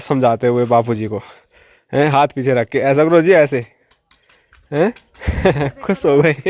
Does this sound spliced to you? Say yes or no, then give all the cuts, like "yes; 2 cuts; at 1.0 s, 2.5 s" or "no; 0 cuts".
no; 0 cuts